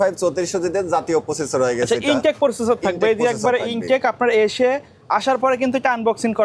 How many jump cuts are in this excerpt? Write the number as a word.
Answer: zero